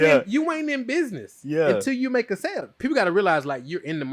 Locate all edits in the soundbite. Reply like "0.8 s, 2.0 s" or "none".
2.7 s